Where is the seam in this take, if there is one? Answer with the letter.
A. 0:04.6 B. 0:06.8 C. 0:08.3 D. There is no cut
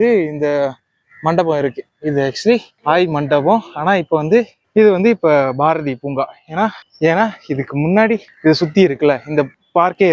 D